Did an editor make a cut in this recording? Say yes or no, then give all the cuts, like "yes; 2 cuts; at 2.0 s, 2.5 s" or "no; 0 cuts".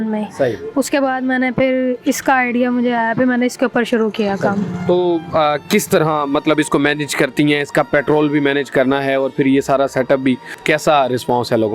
no; 0 cuts